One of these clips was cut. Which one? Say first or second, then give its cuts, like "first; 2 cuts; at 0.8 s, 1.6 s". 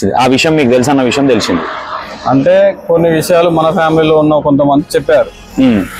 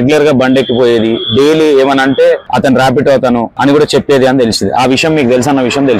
second; 2 cuts; at 2.5 s, 3.5 s